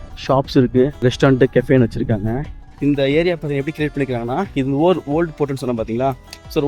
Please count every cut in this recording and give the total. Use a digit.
2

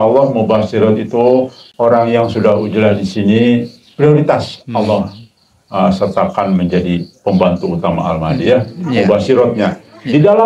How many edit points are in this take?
1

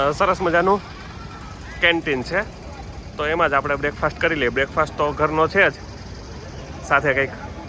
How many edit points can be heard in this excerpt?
0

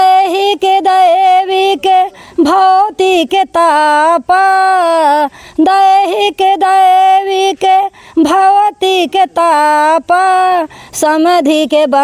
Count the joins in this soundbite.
0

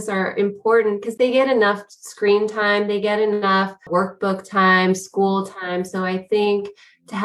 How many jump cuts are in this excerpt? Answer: 2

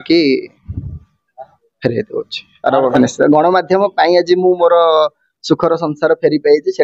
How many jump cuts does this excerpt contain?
1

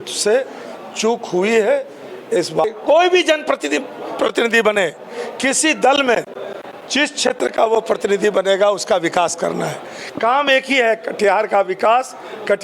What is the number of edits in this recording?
1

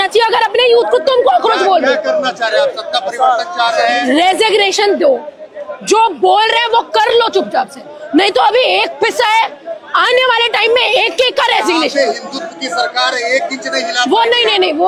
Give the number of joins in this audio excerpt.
0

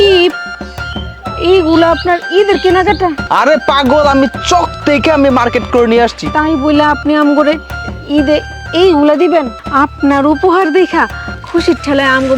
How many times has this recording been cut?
2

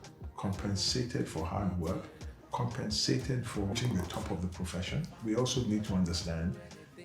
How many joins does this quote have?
2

